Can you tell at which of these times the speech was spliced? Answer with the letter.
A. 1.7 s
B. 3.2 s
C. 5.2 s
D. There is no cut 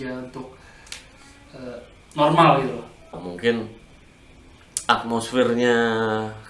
B